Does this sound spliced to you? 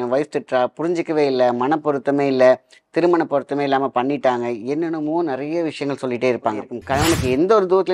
yes; 1 cut; at 6.8 s

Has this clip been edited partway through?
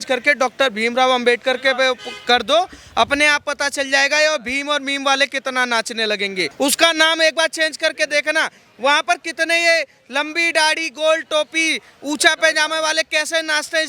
yes; 1 cut; at 6.5 s

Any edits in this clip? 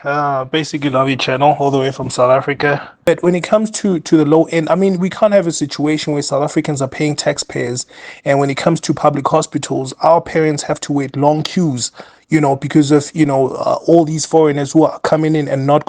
yes; 1 cut; at 3.1 s

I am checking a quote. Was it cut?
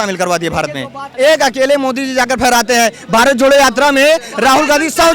yes; 1 cut; at 1.0 s

